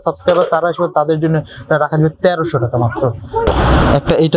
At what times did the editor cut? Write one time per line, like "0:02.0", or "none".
0:03.5